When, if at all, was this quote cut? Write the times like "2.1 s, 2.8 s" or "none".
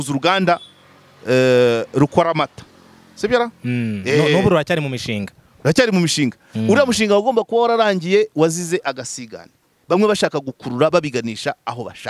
none